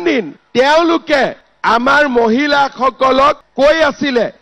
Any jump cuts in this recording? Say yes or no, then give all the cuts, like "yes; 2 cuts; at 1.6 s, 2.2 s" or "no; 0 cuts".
yes; 1 cut; at 3.4 s